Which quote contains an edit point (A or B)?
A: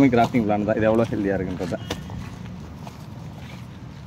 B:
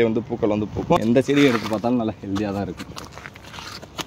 B